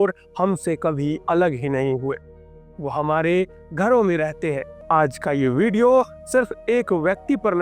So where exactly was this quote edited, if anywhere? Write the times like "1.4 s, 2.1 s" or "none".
4.7 s